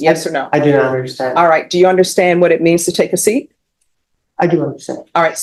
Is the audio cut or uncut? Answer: uncut